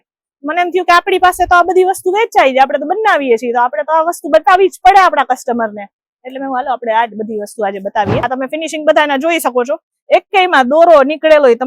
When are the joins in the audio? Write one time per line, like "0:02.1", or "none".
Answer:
0:08.2